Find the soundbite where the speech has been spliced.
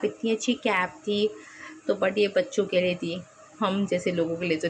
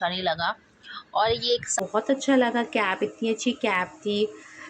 second; 1 cut; at 1.7 s

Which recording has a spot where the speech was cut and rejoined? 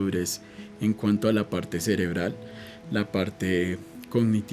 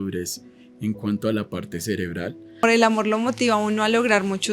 second; 1 cut; at 2.6 s

